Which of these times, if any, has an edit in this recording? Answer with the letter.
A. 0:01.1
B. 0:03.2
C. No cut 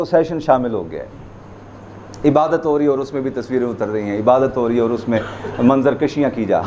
C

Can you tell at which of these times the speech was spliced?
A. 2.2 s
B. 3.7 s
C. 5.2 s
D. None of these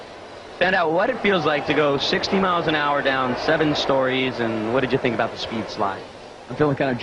C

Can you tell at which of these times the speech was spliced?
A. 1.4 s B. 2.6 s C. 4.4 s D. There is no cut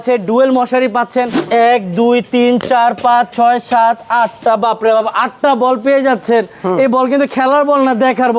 A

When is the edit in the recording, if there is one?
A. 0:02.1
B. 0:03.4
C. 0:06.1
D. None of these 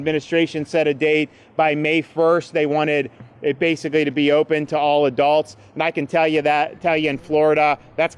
D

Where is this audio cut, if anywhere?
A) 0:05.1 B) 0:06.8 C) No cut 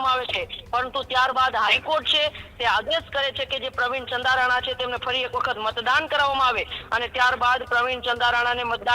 C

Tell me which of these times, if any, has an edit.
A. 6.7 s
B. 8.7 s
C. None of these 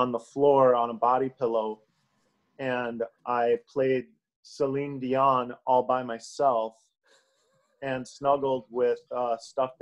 C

